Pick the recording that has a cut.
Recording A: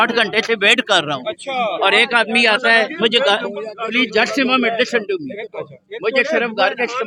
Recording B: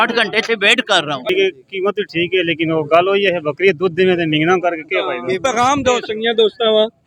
B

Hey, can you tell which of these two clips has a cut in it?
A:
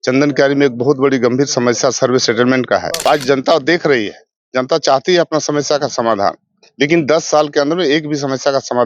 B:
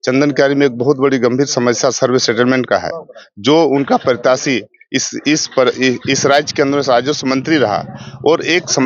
A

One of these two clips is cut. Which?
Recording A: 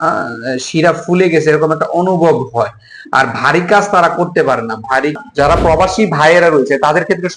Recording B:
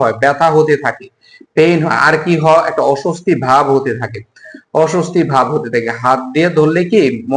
A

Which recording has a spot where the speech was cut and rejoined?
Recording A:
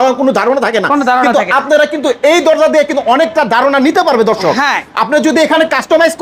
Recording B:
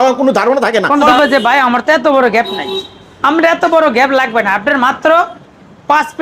B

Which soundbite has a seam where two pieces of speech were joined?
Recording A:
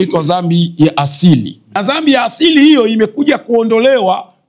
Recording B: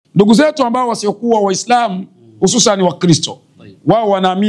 A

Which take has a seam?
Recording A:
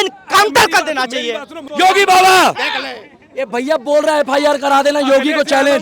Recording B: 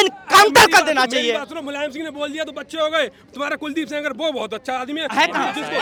A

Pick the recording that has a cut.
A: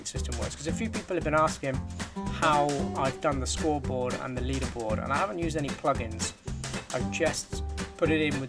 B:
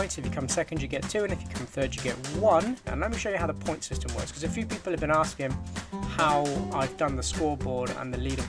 B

